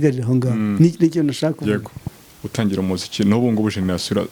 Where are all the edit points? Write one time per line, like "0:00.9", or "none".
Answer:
none